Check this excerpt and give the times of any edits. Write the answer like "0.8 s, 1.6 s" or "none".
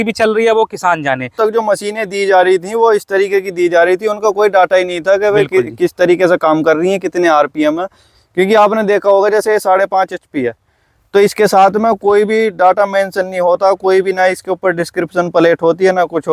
none